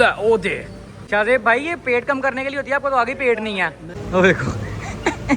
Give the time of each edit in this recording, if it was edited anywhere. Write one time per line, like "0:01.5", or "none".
0:01.0
0:03.8